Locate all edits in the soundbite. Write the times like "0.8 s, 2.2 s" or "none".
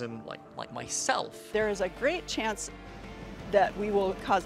1.4 s